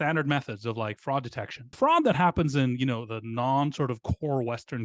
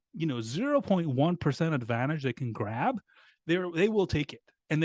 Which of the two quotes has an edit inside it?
first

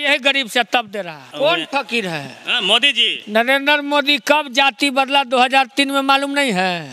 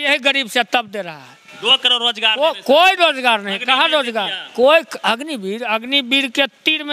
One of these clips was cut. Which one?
first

